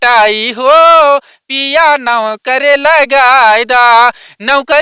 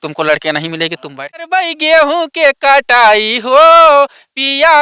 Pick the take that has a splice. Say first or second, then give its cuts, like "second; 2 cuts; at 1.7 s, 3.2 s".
second; 1 cut; at 1.4 s